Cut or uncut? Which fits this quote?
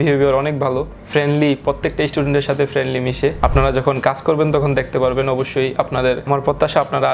uncut